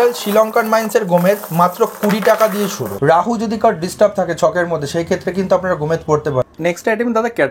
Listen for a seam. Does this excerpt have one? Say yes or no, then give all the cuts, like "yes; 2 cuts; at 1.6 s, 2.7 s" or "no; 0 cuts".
yes; 2 cuts; at 2.8 s, 6.5 s